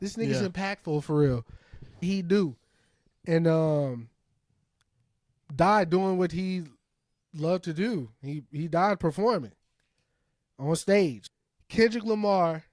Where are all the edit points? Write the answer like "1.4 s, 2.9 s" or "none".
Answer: 2.0 s, 11.2 s